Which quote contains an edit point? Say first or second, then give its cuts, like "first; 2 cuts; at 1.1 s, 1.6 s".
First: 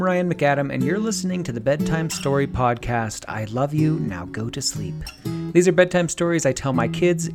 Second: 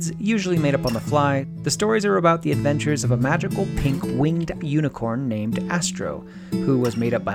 second; 1 cut; at 1.5 s